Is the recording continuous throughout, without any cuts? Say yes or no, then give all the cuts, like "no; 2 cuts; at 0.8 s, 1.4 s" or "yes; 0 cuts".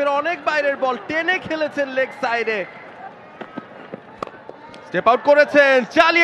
no; 1 cut; at 3.1 s